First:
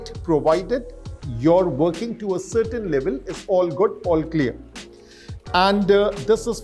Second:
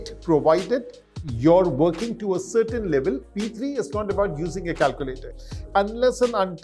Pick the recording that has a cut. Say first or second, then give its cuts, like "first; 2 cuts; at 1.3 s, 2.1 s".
second; 2 cuts; at 3.3 s, 5.5 s